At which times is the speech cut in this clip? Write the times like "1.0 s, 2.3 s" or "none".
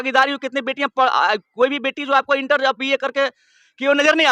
none